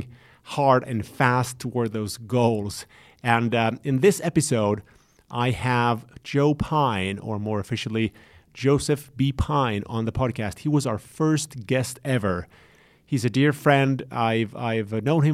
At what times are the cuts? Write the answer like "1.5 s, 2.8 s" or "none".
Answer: none

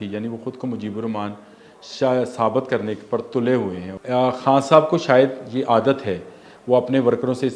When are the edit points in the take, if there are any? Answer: 3.9 s

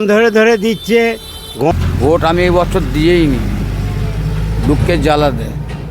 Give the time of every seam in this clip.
1.7 s

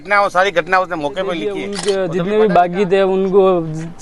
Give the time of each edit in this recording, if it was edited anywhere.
1.7 s

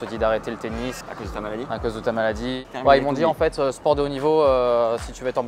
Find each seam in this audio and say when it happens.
1.1 s, 2.6 s

